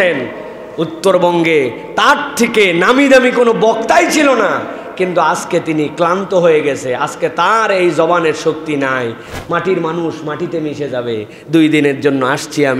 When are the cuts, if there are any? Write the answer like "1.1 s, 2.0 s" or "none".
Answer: 9.2 s